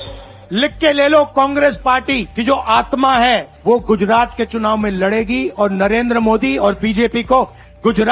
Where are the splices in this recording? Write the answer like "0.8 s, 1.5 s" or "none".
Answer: 2.3 s, 3.5 s